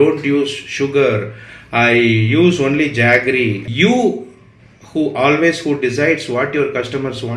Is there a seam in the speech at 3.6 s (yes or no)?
yes